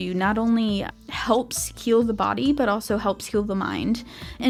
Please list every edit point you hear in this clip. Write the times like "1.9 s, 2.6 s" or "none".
none